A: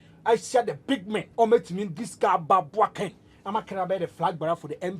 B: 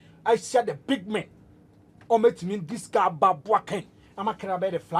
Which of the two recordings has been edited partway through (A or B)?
A